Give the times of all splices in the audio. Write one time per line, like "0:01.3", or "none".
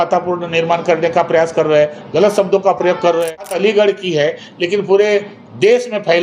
0:03.5